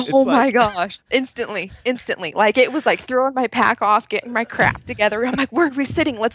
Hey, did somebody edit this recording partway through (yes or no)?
no